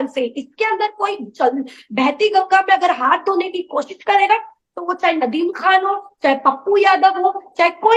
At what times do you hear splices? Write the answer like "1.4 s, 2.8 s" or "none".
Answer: none